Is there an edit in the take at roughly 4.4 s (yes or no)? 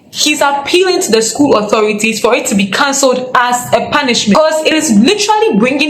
yes